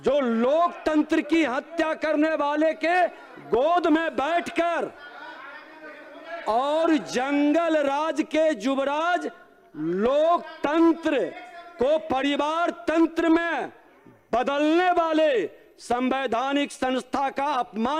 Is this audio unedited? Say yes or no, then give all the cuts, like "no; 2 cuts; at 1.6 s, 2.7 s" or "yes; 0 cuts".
yes; 0 cuts